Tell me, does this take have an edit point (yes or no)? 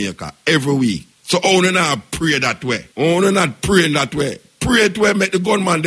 yes